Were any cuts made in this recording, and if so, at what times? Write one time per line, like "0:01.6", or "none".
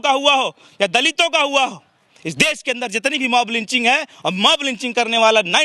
none